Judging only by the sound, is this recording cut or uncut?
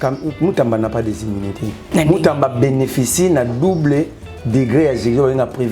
cut